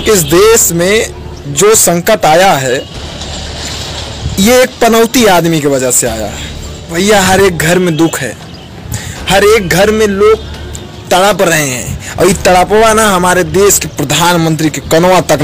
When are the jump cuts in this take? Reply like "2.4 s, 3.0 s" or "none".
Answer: 6.9 s